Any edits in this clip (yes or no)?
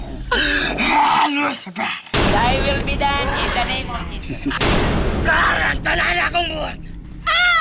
no